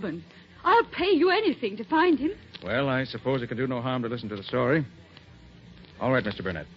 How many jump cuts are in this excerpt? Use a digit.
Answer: 1